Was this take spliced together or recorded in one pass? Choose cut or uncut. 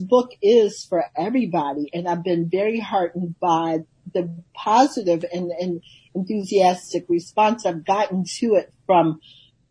uncut